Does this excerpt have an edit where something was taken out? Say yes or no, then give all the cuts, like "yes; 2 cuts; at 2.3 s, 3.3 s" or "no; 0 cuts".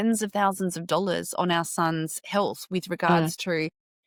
no; 0 cuts